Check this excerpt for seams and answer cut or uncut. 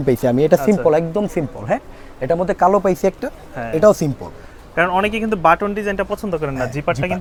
uncut